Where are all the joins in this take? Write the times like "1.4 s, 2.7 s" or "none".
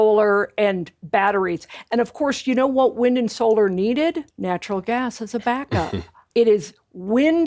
4.3 s, 6.1 s